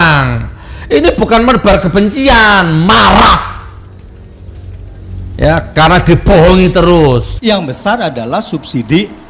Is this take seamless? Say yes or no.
no